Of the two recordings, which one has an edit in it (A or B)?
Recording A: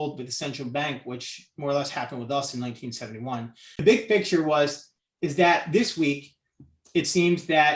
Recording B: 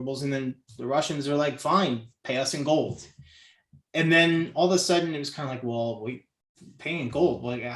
A